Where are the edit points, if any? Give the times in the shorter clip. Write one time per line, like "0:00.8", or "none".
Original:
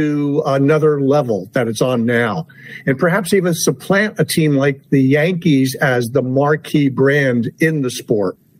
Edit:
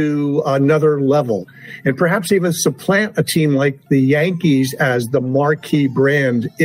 0:01.5